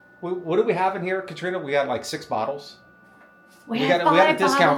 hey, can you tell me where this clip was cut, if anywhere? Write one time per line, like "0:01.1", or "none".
none